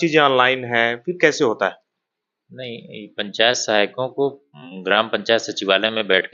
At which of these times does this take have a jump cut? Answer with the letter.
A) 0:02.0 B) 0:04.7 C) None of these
C